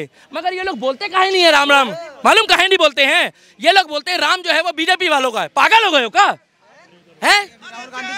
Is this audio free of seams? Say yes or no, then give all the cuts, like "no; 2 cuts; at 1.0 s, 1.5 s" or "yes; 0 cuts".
yes; 0 cuts